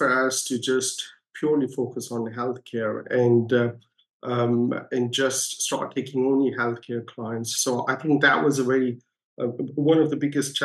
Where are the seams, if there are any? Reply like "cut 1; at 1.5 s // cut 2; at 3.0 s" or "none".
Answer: none